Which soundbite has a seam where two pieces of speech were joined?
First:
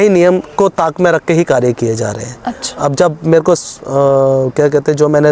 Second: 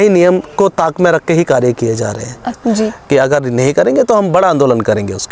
second; 1 cut; at 2.6 s

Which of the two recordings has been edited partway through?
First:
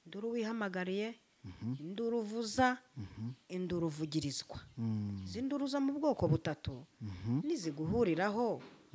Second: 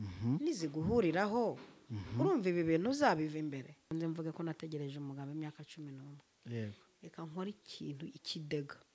second; 1 cut; at 3.9 s

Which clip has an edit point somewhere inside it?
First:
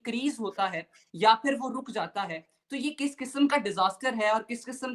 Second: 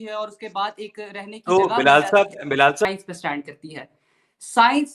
second; 1 cut; at 2.9 s

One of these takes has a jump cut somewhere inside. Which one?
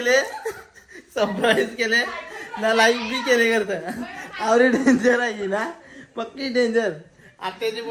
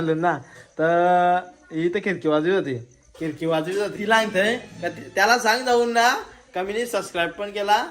second; 1 cut; at 3.9 s

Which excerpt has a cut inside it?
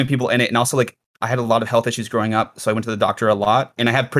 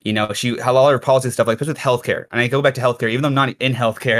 first; 1 cut; at 1.0 s

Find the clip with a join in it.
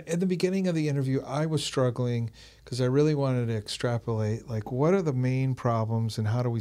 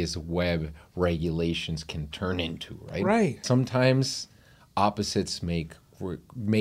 second; 1 cut; at 3.4 s

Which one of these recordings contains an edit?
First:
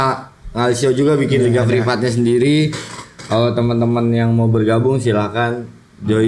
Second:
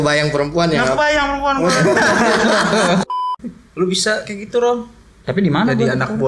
second; 1 cut; at 3.0 s

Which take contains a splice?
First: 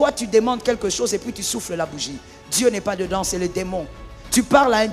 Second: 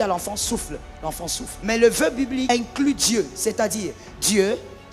second; 2 cuts; at 1.5 s, 2.5 s

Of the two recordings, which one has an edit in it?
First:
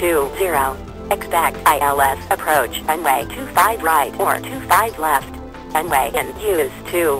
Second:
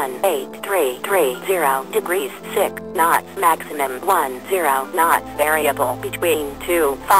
first; 2 cuts; at 0.8 s, 5.3 s

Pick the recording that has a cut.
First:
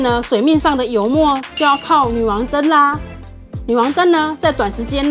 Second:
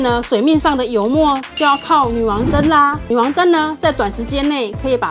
second; 1 cut; at 3.0 s

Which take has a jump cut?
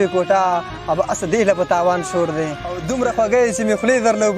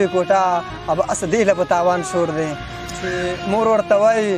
first; 1 cut; at 2.8 s

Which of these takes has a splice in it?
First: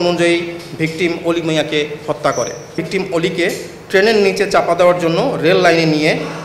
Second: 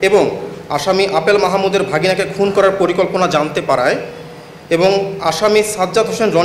first; 1 cut; at 2.8 s

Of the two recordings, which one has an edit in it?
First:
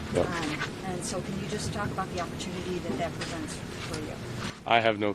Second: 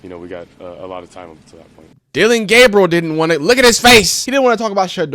second; 2 cuts; at 1.9 s, 4.2 s

